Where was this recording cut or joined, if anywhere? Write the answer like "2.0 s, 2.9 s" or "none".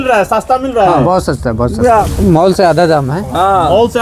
none